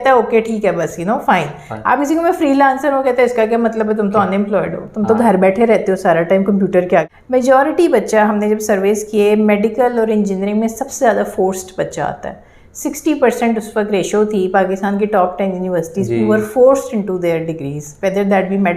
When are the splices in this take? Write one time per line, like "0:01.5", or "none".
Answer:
0:07.1